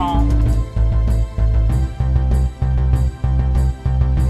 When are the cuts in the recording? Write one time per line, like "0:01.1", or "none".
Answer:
none